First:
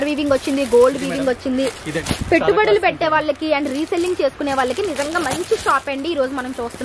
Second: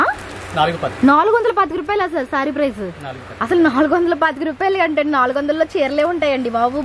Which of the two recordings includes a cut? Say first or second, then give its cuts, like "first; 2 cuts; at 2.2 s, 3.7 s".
first; 1 cut; at 1.9 s